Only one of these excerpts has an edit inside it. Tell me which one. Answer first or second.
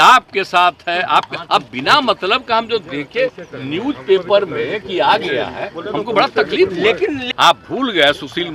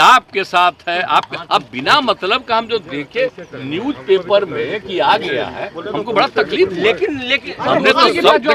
first